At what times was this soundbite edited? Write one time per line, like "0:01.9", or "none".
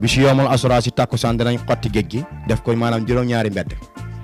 none